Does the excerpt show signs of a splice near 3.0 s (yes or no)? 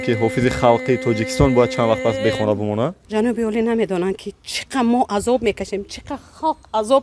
yes